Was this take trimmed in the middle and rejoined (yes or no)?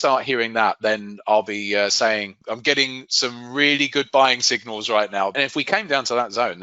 yes